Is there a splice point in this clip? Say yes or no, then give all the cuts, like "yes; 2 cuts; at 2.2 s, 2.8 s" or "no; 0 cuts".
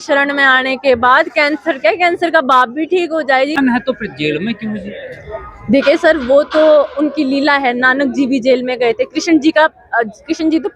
yes; 1 cut; at 3.6 s